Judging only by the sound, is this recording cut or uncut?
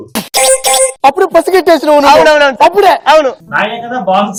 uncut